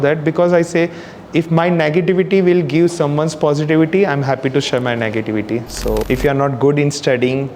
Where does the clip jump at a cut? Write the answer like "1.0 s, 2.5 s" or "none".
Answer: 6.0 s